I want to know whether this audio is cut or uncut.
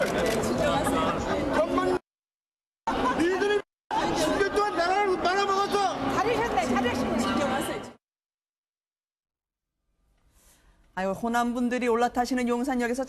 uncut